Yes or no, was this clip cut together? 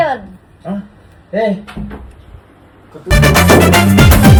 no